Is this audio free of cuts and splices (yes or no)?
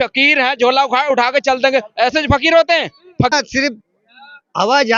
no